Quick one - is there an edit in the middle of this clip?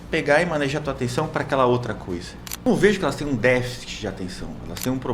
yes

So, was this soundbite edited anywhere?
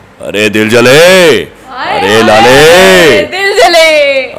no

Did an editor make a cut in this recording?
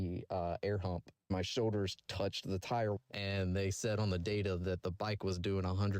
yes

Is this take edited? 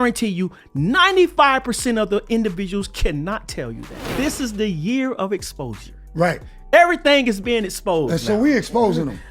yes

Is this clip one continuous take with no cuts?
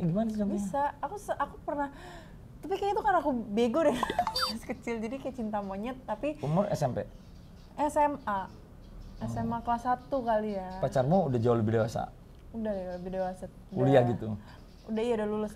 yes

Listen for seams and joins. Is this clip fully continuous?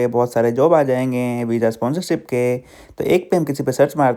yes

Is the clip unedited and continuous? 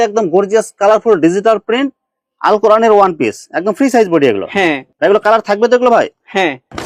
yes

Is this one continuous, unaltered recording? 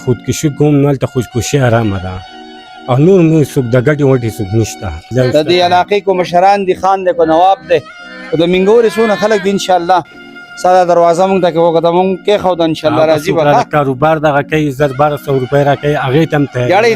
no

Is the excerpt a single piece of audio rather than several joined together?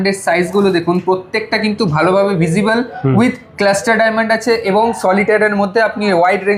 yes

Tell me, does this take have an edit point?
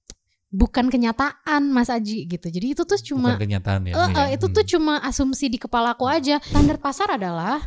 yes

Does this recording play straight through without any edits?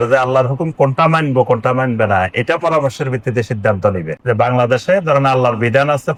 yes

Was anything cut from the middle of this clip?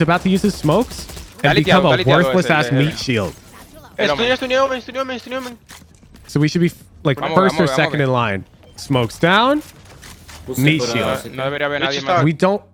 no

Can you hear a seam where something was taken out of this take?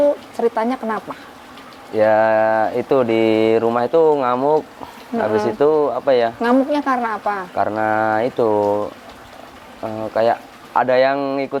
no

